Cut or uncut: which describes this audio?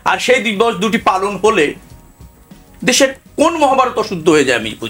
uncut